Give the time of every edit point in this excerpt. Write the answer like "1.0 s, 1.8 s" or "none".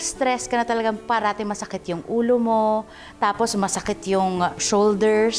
none